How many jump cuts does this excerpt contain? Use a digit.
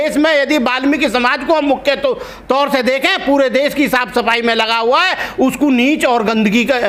0